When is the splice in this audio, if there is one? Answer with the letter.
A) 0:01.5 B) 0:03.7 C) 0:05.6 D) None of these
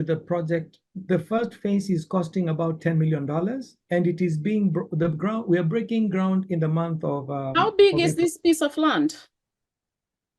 D